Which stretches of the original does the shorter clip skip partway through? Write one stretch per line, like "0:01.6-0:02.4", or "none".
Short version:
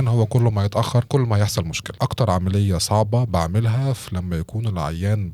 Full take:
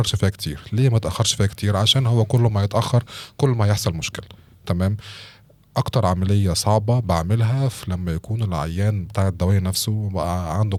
0:03.0-0:03.3
0:04.1-0:05.6